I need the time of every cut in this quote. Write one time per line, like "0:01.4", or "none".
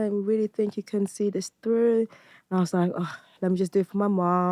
none